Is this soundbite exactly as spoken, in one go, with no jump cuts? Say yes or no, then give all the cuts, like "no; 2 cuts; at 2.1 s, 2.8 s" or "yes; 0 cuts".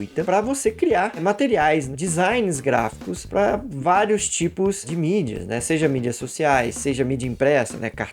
yes; 0 cuts